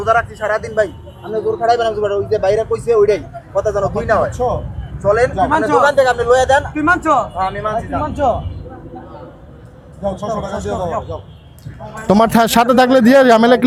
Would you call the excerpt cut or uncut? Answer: uncut